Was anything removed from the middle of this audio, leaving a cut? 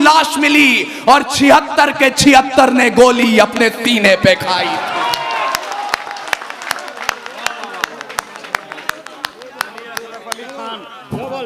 no; 0 cuts

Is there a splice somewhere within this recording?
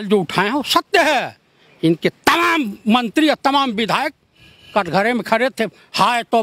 no; 0 cuts

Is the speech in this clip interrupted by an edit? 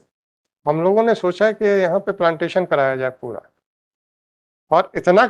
no; 0 cuts

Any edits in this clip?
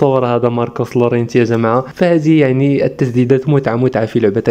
no; 0 cuts

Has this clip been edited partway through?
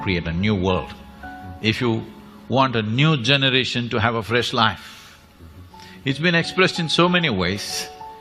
no; 0 cuts

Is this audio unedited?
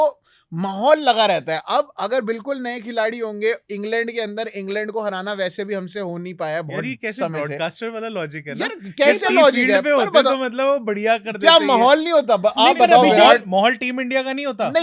yes; 0 cuts

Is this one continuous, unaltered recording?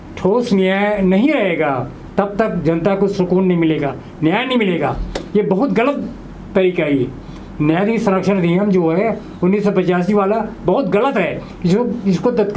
yes; 0 cuts

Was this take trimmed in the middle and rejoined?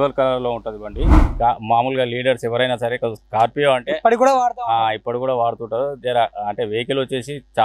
yes; 1 cut; at 1.2 s

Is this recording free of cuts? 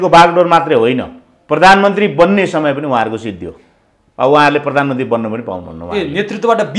yes; 0 cuts

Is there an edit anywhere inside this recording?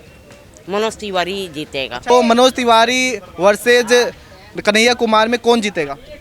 yes; 1 cut; at 2.1 s

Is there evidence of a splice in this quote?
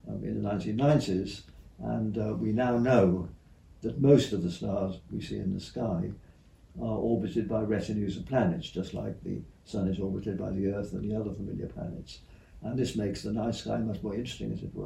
no; 0 cuts

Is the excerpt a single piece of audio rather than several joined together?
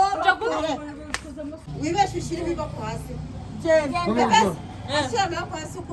no; 1 cut; at 1.7 s

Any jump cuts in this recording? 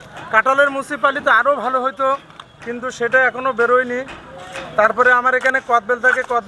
no; 0 cuts

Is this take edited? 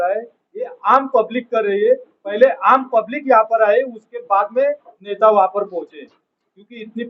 no; 0 cuts

